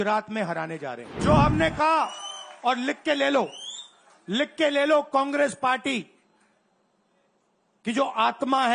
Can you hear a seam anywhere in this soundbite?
yes; 1 cut; at 1.1 s

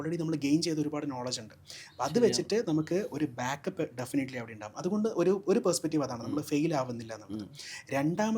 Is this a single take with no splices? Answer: yes; 0 cuts

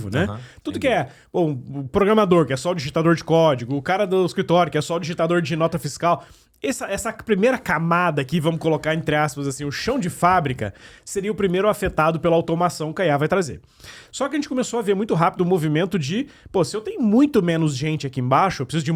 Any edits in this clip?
no; 0 cuts

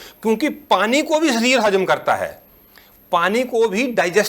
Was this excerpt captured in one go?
yes; 0 cuts

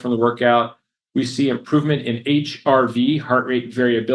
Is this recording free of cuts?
yes; 0 cuts

